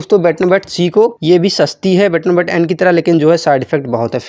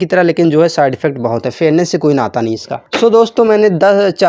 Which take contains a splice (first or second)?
second